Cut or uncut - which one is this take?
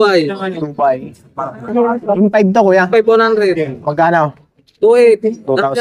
uncut